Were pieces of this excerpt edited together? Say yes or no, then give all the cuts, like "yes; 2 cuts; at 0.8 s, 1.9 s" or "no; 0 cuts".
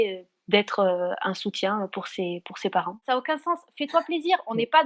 yes; 1 cut; at 3.0 s